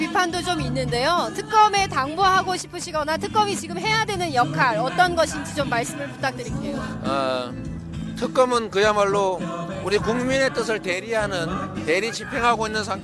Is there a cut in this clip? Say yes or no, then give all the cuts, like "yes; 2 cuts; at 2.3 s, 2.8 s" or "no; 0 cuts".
yes; 1 cut; at 6.1 s